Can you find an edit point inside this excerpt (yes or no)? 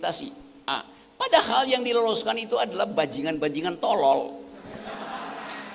no